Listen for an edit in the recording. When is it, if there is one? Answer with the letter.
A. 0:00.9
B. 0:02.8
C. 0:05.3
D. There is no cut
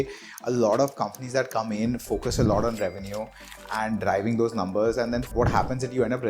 C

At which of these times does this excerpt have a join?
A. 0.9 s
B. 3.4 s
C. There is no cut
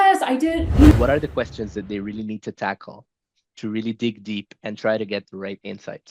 A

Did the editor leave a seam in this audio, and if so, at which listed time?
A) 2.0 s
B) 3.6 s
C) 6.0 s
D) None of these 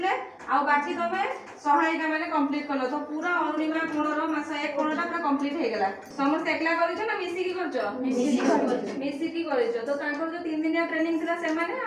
C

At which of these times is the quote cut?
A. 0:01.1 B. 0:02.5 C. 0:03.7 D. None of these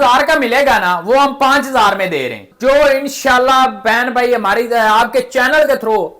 B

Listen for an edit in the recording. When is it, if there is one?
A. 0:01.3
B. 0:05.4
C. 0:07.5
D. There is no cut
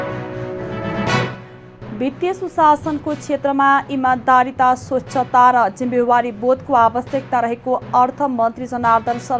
A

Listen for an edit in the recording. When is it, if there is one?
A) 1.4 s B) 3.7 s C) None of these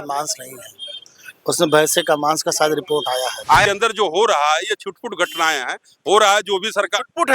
B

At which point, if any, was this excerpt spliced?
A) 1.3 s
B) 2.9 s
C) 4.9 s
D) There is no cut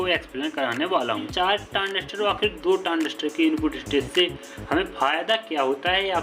A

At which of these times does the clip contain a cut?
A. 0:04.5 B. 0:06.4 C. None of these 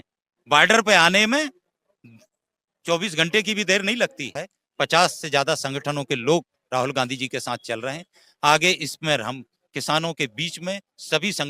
A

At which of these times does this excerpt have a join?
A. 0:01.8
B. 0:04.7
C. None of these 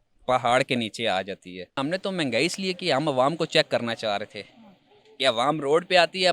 A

